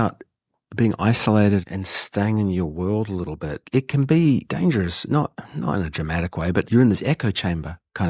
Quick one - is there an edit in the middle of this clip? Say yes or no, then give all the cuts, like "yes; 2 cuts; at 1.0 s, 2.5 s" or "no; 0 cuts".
yes; 1 cut; at 1.6 s